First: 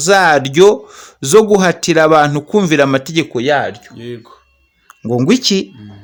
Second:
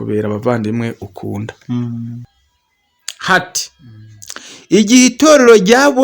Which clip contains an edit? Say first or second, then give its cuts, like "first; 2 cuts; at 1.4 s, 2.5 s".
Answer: second; 1 cut; at 2.2 s